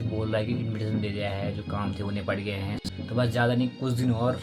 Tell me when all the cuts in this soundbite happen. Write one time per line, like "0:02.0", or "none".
0:02.9